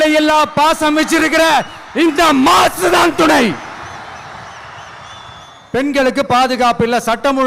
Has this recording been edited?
yes; 1 cut; at 5.2 s

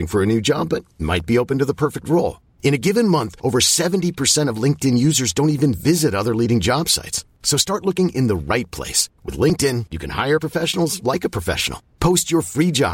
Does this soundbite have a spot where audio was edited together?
no; 0 cuts

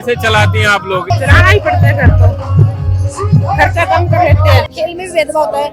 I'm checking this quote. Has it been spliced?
yes; 2 cuts; at 1.1 s, 4.6 s

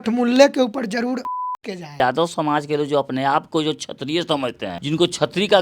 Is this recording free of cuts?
no; 2 cuts; at 2.0 s, 4.8 s

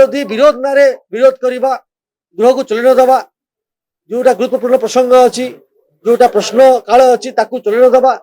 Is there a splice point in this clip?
no; 0 cuts

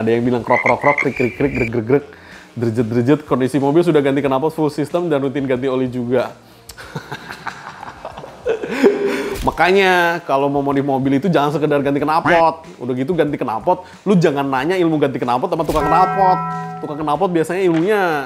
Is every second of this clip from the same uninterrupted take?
yes; 0 cuts

